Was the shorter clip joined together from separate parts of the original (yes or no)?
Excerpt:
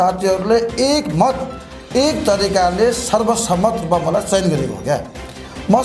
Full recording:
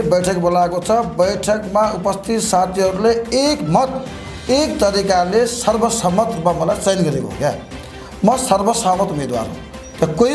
no